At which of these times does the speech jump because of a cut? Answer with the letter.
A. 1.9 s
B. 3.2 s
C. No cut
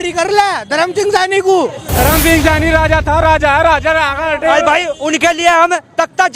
A